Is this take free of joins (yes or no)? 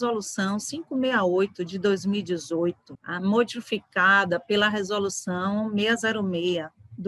yes